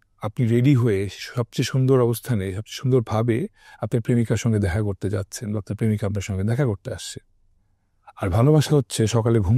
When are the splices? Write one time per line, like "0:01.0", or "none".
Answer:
none